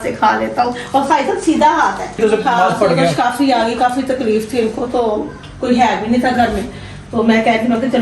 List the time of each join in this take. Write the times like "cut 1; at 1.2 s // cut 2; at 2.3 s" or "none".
cut 1; at 2.2 s